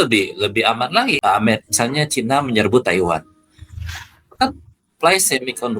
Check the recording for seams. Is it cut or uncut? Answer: cut